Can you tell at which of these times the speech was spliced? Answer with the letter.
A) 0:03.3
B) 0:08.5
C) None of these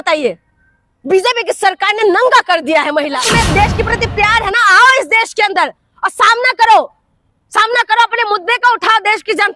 A